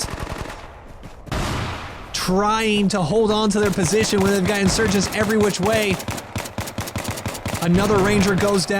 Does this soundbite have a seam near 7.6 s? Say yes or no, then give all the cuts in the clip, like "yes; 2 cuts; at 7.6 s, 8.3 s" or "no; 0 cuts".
yes; 1 cut; at 7.6 s